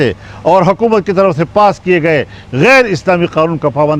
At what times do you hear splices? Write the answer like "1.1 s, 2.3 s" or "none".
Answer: none